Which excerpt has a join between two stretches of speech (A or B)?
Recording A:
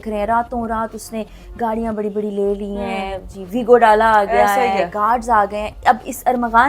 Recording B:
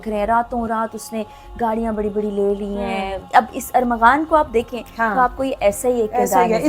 B